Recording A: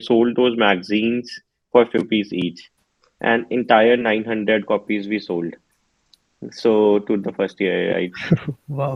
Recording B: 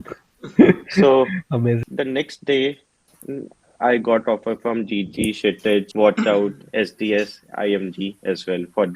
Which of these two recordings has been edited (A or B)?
B